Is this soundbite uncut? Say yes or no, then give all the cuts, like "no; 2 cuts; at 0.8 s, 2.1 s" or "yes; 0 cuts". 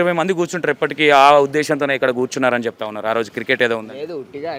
yes; 0 cuts